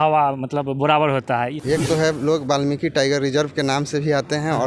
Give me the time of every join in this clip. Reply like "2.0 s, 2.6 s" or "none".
1.6 s